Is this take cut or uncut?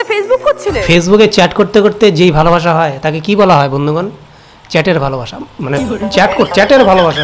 uncut